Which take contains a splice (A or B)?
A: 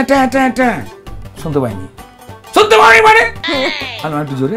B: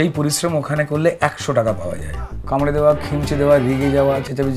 B